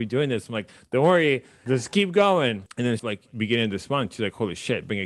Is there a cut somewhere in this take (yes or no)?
yes